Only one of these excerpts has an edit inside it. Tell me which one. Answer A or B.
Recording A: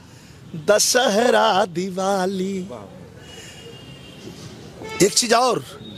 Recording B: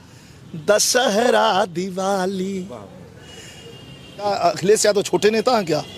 B